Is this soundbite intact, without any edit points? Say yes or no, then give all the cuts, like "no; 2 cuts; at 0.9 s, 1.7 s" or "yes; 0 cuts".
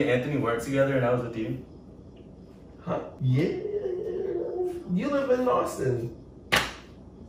yes; 0 cuts